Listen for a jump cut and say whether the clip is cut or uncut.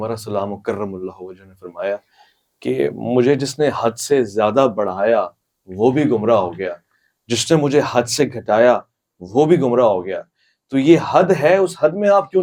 uncut